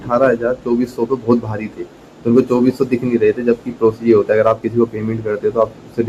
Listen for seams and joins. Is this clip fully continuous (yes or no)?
yes